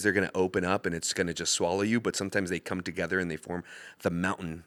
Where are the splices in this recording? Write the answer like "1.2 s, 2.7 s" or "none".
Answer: none